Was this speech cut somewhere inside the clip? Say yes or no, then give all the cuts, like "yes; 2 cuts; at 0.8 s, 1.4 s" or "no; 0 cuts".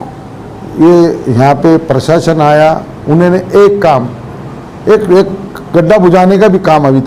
no; 0 cuts